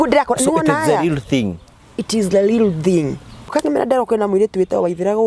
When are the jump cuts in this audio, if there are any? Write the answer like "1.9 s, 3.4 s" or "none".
3.5 s

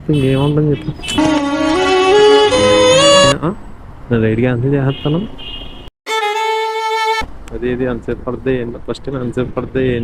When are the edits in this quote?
3.4 s

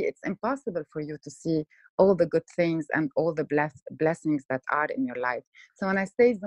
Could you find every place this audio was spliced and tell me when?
none

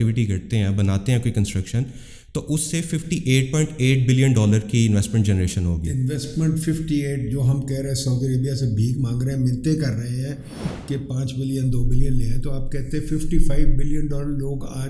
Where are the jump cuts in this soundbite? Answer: none

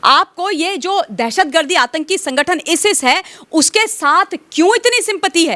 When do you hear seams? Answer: none

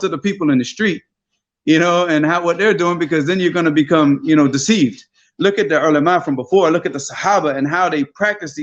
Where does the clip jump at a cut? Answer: none

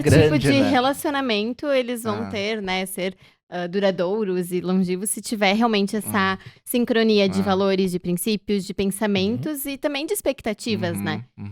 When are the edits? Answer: none

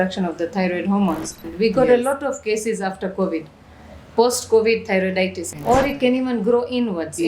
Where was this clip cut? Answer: 1.5 s, 5.5 s

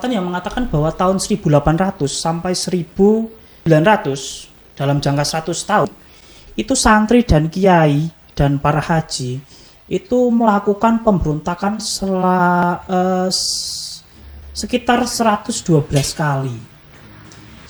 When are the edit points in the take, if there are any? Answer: none

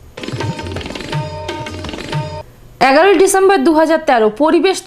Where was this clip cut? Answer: 2.2 s

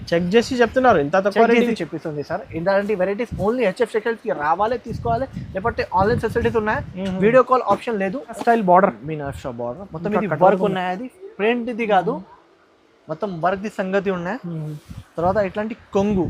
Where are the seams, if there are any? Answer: 8.4 s

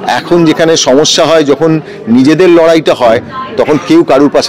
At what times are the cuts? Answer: none

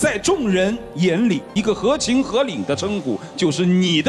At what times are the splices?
1.5 s

